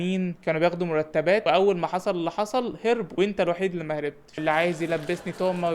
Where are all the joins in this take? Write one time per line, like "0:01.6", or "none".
0:01.4
0:04.3